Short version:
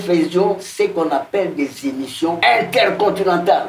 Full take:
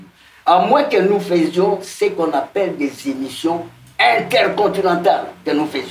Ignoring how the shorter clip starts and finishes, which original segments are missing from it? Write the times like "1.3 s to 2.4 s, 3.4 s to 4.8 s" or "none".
3.6 s to 4.0 s

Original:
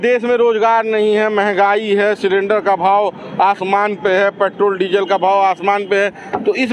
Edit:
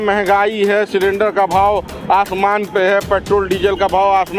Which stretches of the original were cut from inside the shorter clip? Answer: none

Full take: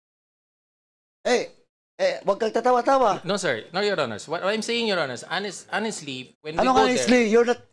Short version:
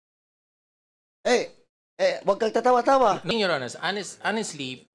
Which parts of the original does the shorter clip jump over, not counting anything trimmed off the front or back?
3.3 s to 4.8 s

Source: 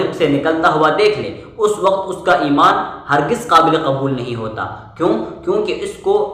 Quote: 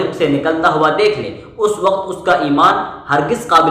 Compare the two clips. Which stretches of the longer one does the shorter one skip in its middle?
none

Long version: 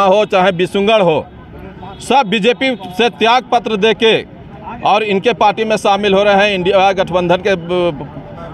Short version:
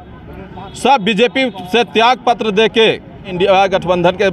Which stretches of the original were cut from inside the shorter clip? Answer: 4.6 s to 6.6 s

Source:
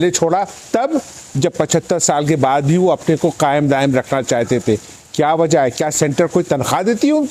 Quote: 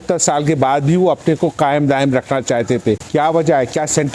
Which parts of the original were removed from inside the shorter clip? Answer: 4.8 s to 5.1 s

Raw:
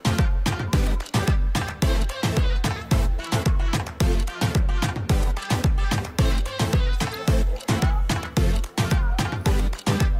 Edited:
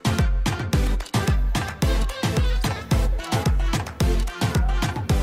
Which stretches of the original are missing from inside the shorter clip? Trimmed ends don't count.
none

